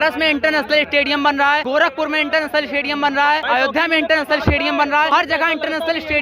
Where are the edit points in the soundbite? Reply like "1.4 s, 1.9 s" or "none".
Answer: 1.6 s, 3.4 s, 5.1 s

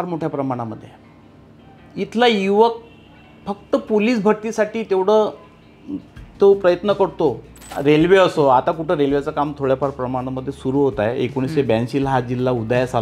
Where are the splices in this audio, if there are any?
7.8 s

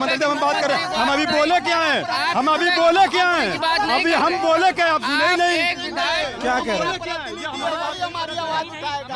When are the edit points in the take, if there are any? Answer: none

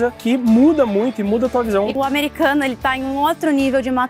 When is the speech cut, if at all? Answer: 1.9 s

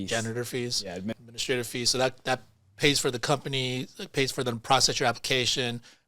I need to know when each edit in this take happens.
1.1 s

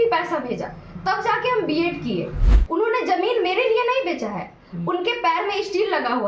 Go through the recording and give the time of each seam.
2.4 s

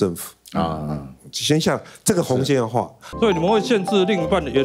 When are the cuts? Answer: 3.1 s

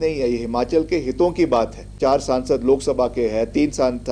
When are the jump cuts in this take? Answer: 2.0 s

